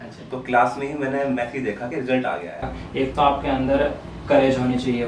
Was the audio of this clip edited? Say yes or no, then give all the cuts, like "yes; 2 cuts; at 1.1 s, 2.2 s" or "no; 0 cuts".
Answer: yes; 1 cut; at 2.8 s